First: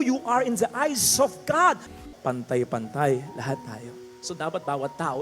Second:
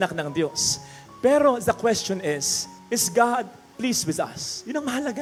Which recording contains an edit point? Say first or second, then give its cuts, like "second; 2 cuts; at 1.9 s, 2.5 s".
first; 1 cut; at 1.9 s